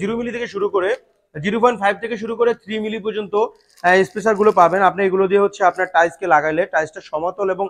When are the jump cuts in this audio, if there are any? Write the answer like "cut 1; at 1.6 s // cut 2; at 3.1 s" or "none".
none